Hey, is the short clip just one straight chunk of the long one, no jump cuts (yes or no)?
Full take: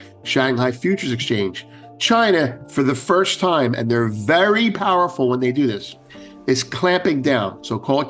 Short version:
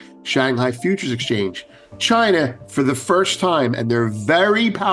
yes